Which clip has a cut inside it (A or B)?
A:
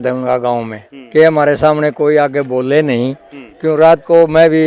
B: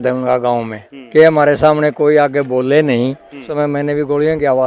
B